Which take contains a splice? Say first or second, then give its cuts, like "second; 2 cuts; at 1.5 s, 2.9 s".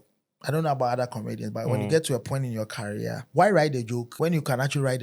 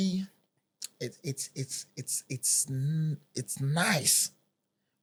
first; 2 cuts; at 3.2 s, 4.1 s